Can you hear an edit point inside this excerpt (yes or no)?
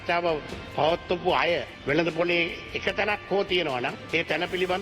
yes